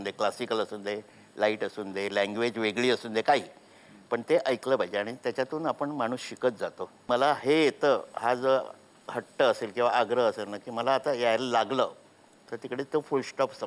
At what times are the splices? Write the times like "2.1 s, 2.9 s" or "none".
7.1 s